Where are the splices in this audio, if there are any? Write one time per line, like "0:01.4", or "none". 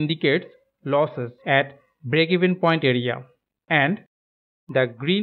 0:03.4